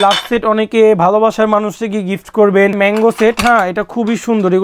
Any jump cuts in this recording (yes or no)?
yes